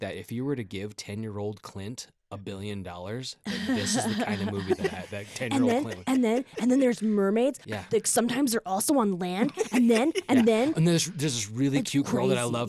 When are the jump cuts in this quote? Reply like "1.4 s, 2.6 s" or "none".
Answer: 10.8 s